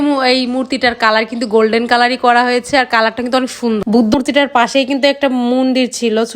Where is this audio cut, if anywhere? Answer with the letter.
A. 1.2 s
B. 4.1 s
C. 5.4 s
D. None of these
B